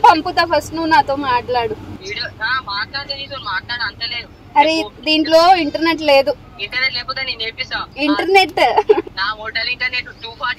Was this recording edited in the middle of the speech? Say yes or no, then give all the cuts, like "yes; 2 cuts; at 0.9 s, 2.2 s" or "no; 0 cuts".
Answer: yes; 4 cuts; at 2.0 s, 6.5 s, 7.9 s, 9.1 s